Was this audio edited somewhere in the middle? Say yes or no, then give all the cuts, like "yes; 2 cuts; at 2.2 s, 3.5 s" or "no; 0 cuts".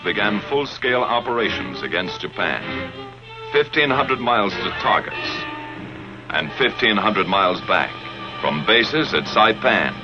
no; 0 cuts